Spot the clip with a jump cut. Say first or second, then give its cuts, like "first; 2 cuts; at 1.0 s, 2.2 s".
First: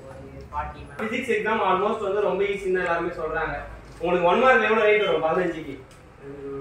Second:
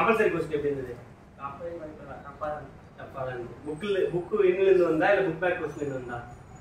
first; 1 cut; at 1.0 s